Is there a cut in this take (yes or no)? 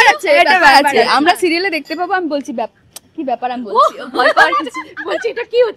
no